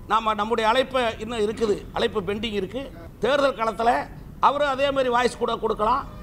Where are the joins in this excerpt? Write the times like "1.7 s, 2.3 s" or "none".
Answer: 3.0 s